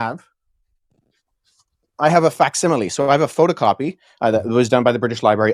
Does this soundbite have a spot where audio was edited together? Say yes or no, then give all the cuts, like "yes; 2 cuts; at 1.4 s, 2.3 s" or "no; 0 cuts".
no; 0 cuts